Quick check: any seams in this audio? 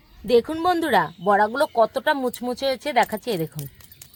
no; 0 cuts

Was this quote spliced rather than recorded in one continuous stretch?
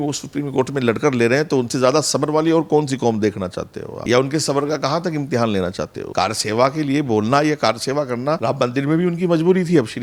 no; 0 cuts

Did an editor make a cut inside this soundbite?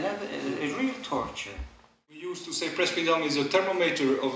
yes; 1 cut; at 2.4 s

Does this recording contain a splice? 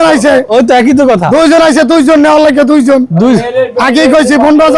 no; 0 cuts

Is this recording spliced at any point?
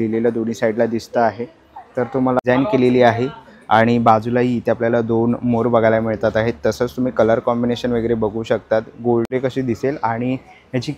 yes; 2 cuts; at 2.4 s, 9.3 s

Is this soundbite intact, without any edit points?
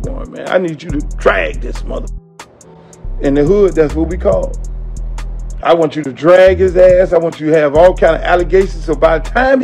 yes; 0 cuts

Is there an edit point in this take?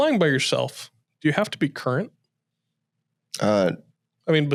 no; 0 cuts

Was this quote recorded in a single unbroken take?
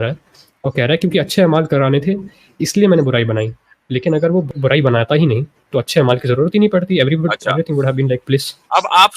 no; 1 cut; at 4.5 s

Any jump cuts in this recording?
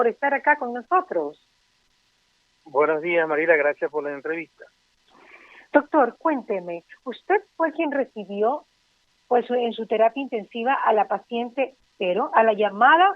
no; 0 cuts

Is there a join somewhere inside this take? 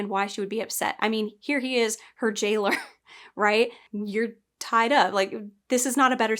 yes; 1 cut; at 3.9 s

